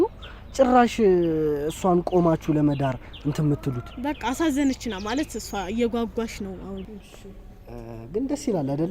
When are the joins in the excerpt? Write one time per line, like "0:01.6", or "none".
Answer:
0:06.8